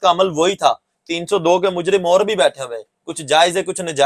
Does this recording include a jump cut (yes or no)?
no